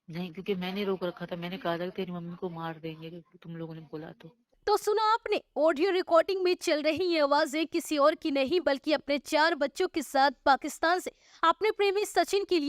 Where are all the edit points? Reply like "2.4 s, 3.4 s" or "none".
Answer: 4.4 s